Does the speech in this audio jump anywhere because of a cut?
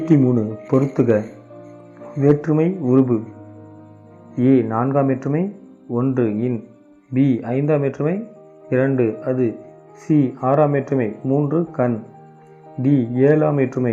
no; 0 cuts

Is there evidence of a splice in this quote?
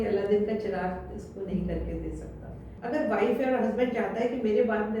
yes; 1 cut; at 2.7 s

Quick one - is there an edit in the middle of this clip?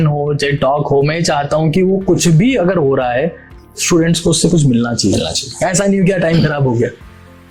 no; 0 cuts

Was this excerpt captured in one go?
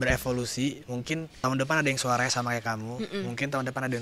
no; 1 cut; at 1.3 s

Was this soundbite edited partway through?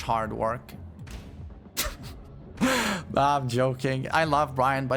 yes; 1 cut; at 4.0 s

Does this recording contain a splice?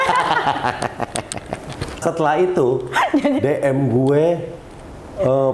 yes; 1 cut; at 2.0 s

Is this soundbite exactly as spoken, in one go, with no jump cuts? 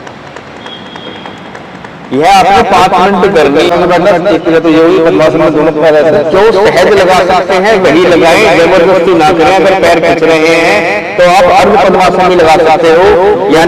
no; 1 cut; at 3.7 s

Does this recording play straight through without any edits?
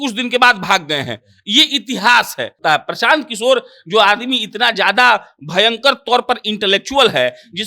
no; 1 cut; at 2.5 s

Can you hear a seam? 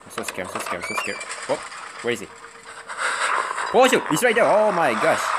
no; 0 cuts

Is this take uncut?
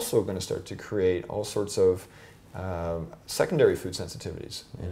yes; 0 cuts

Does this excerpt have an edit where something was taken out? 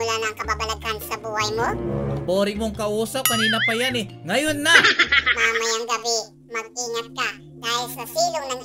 no; 0 cuts

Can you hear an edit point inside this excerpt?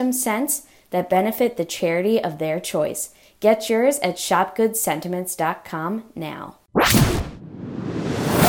yes; 1 cut; at 6.6 s

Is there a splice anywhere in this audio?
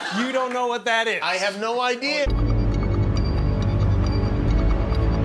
no; 0 cuts

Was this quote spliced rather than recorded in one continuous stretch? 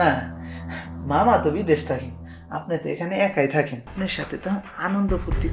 yes; 1 cut; at 3.8 s

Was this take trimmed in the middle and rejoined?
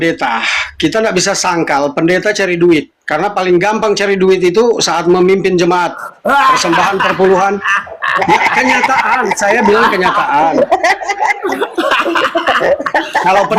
yes; 1 cut; at 11.1 s

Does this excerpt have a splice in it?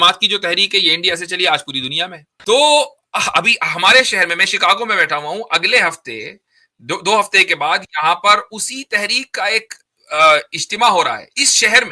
yes; 1 cut; at 2.3 s

